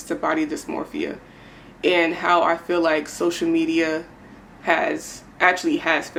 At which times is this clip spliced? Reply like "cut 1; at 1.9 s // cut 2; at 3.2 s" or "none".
none